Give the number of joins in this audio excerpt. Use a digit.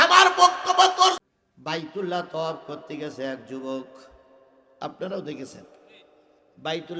1